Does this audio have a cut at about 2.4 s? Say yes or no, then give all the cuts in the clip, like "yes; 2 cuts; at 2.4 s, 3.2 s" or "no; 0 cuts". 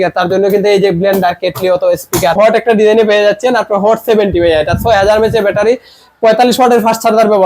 yes; 1 cut; at 2.4 s